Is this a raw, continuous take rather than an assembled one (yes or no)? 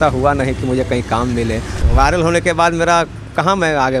no